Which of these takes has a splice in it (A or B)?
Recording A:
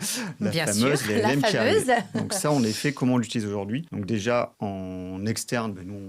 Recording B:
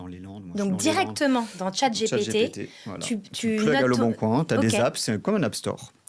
A